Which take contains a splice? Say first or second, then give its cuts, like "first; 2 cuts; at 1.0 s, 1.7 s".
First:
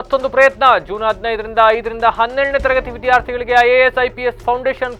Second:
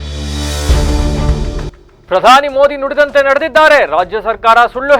second; 1 cut; at 1.8 s